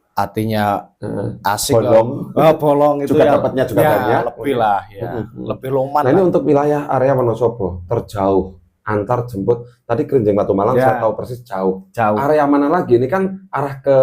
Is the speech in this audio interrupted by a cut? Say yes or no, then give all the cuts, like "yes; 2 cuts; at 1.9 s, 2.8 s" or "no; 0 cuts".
yes; 1 cut; at 6.0 s